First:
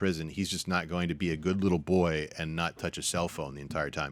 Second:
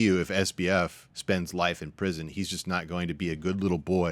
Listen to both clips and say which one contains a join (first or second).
second